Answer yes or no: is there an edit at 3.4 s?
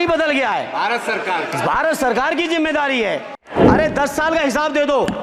yes